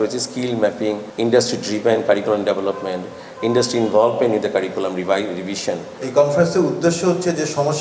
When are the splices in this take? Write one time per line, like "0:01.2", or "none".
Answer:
0:01.1
0:05.9